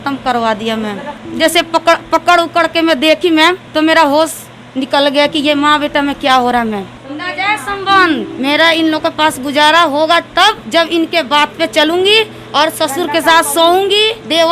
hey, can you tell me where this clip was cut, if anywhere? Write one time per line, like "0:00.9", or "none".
0:01.2
0:08.3